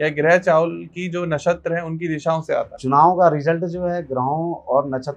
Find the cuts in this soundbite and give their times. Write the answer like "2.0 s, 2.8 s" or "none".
2.7 s